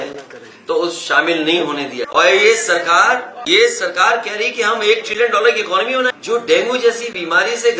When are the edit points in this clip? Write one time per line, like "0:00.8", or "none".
0:02.0
0:03.3
0:06.1